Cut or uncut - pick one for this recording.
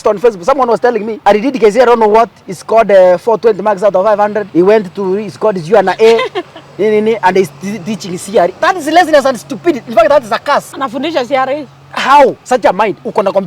cut